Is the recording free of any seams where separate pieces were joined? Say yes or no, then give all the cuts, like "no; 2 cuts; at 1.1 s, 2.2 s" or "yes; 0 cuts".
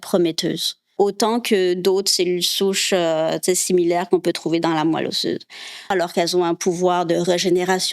no; 2 cuts; at 0.9 s, 5.9 s